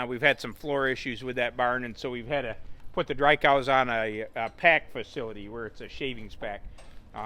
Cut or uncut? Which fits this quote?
uncut